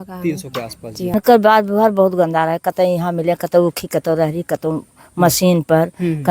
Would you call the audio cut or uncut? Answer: cut